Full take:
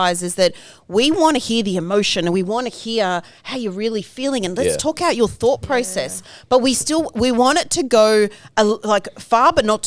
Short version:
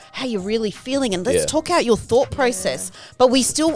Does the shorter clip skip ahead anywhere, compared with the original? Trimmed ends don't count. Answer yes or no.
no